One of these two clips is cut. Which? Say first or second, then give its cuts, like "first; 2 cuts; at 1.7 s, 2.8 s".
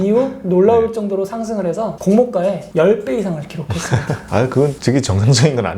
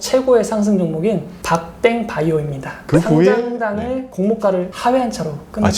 second; 1 cut; at 2.8 s